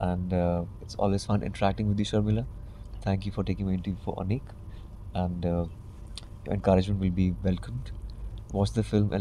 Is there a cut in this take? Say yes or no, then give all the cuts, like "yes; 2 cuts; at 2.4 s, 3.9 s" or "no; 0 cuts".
no; 0 cuts